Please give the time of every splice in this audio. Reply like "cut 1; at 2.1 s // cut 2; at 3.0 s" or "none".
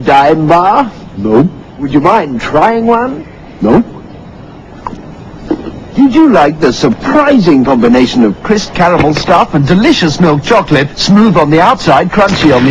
none